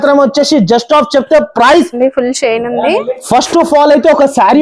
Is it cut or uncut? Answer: cut